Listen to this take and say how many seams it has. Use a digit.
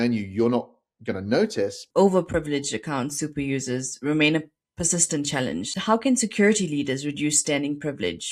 2